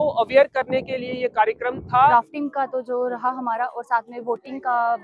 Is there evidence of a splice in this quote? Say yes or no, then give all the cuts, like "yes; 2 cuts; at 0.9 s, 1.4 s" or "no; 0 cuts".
yes; 1 cut; at 2.1 s